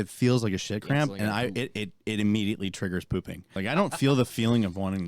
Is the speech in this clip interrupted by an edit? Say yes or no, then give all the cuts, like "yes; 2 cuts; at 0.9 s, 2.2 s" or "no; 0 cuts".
yes; 1 cut; at 3.5 s